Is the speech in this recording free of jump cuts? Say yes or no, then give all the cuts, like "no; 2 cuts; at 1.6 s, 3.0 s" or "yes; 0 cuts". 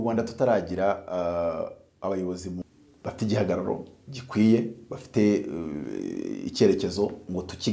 no; 1 cut; at 2.6 s